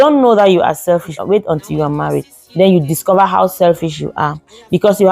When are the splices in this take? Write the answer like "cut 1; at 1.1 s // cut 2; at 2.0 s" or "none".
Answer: cut 1; at 1.1 s